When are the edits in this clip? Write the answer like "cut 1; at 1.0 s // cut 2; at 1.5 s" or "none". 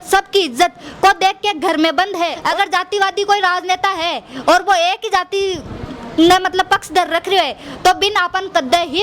cut 1; at 2.4 s